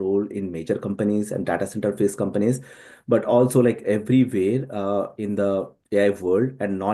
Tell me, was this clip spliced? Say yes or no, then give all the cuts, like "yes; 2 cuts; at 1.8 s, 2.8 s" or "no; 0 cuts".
no; 0 cuts